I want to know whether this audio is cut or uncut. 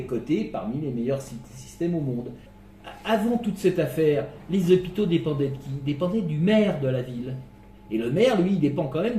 cut